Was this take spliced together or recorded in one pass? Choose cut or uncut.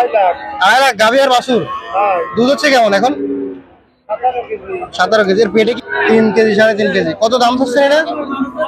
cut